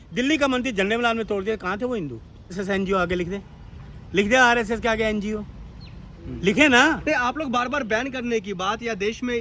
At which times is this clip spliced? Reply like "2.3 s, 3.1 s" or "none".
2.6 s